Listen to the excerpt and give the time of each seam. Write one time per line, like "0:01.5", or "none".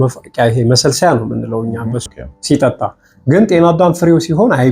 0:02.0

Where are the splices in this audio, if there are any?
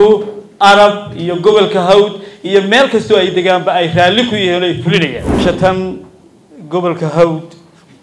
0:05.4

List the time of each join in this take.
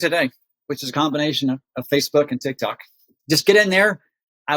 0:03.2

